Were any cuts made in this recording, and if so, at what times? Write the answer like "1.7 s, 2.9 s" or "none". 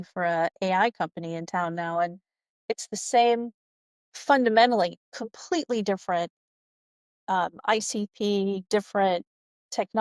none